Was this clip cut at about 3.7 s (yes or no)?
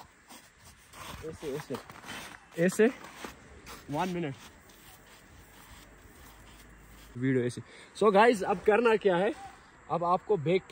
no